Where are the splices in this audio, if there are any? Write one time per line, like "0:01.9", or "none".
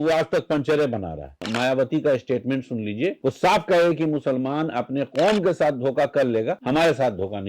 0:01.4
0:03.2
0:06.6